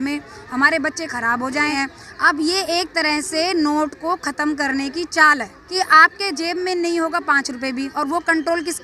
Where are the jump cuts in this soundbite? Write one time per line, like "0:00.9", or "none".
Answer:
0:01.7
0:05.6